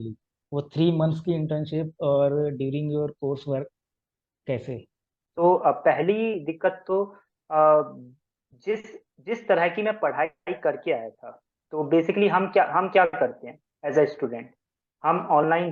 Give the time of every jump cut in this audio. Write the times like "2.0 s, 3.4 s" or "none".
5.2 s